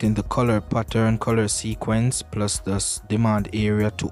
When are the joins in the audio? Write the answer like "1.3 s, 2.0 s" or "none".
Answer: none